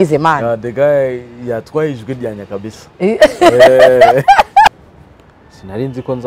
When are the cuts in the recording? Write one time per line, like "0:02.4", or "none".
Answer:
0:04.8